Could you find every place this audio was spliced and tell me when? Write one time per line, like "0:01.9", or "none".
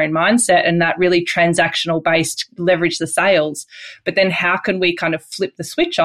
none